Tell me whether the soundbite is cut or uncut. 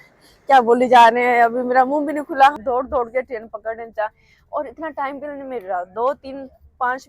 cut